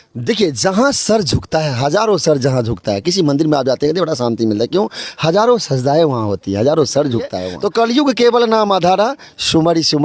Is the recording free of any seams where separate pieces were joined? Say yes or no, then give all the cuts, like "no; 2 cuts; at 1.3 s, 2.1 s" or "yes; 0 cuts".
no; 1 cut; at 7.4 s